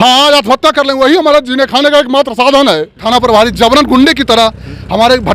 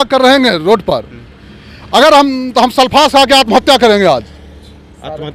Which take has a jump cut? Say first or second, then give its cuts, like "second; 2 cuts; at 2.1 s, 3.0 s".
first; 1 cut; at 3.0 s